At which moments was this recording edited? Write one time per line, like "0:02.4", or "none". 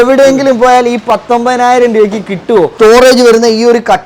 0:02.7